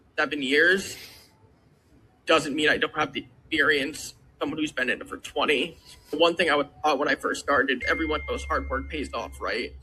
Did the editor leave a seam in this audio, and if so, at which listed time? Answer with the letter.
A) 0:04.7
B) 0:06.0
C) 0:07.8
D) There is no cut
C